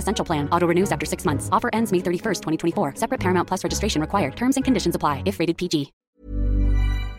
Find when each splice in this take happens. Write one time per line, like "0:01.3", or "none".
0:06.0

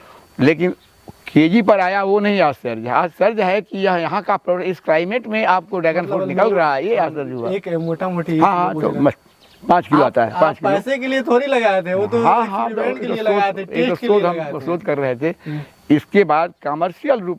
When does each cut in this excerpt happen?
none

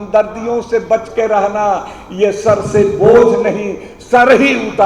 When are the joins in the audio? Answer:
none

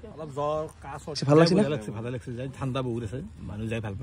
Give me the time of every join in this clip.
0:01.2

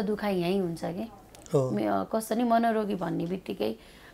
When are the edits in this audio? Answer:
none

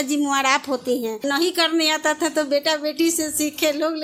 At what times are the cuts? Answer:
0:01.2

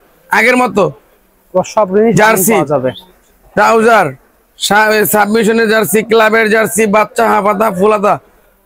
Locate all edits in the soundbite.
none

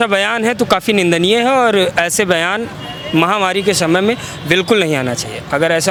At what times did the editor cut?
none

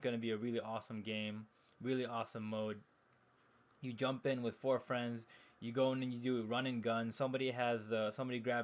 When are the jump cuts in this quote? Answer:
0:05.8

